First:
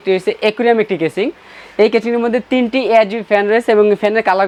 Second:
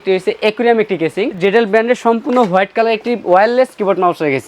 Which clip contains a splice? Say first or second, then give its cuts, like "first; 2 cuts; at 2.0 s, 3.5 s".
second; 1 cut; at 1.4 s